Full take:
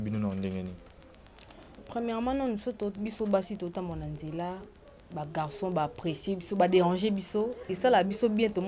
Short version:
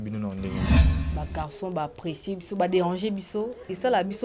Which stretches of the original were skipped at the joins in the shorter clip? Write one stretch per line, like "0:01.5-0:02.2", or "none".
0:00.9-0:04.9